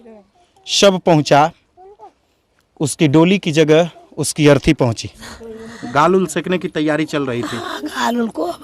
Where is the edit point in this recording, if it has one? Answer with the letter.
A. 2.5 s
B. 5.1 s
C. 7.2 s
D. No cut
B